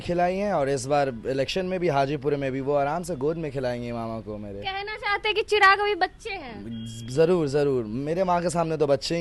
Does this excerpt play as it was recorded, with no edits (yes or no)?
yes